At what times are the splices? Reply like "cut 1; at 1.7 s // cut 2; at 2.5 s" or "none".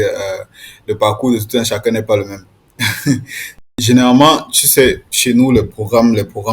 cut 1; at 3.6 s